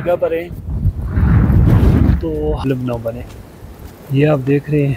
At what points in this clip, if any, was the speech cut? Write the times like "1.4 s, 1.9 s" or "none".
2.6 s